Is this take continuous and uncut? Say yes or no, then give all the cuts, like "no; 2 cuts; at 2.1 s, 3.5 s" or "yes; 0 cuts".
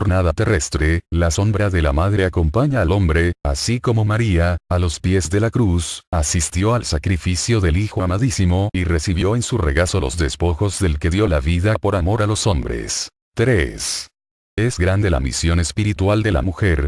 no; 1 cut; at 12.3 s